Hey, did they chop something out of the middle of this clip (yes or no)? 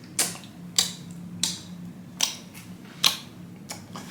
no